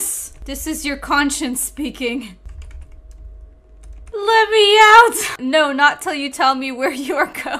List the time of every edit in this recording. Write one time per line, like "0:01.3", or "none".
0:04.1
0:05.2